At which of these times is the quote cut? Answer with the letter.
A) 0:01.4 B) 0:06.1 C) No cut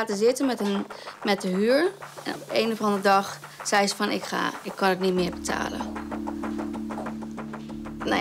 C